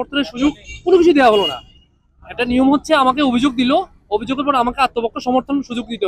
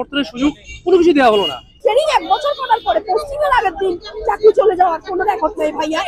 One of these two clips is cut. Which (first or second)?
second